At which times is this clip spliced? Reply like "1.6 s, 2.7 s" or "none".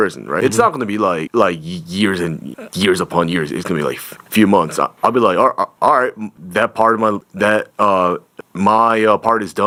none